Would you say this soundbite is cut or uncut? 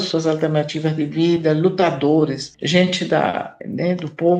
uncut